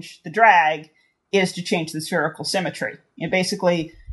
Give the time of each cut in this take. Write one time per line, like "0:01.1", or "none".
none